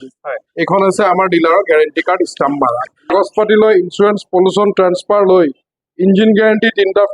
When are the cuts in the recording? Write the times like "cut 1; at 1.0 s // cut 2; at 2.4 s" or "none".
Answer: cut 1; at 3.1 s